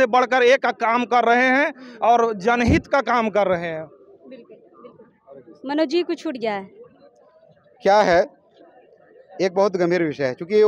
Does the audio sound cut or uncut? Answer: uncut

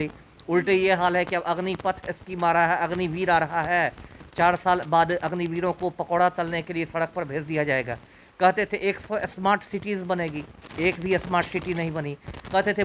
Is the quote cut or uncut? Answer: uncut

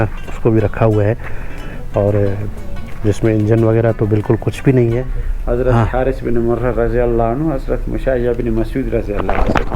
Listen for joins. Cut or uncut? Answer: cut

